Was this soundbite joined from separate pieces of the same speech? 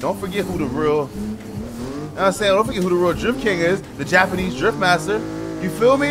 no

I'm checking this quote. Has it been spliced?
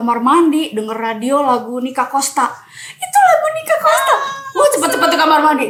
no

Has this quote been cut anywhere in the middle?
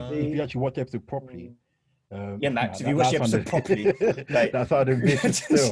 no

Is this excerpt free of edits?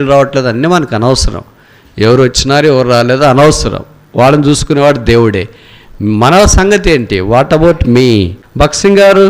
no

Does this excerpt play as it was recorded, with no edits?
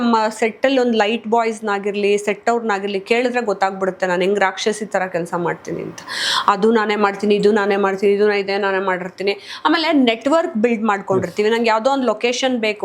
yes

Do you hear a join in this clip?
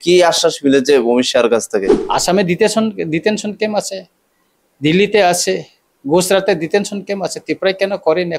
yes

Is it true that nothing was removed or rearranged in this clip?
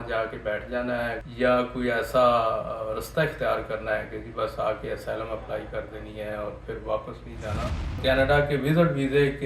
no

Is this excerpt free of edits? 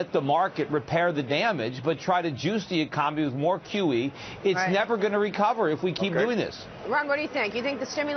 no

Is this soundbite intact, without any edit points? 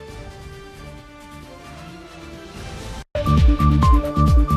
no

